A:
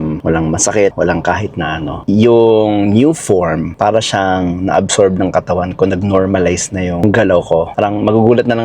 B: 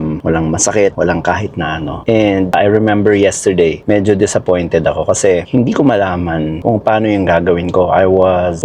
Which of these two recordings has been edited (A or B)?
A